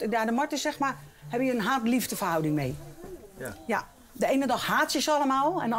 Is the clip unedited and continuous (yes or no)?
yes